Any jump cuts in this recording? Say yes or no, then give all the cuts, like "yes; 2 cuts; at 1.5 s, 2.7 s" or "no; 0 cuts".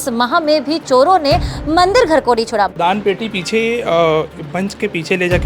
yes; 1 cut; at 2.7 s